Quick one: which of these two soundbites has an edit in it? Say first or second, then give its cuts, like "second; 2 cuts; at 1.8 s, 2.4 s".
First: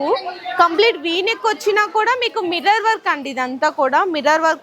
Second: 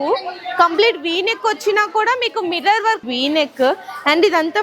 second; 1 cut; at 3.0 s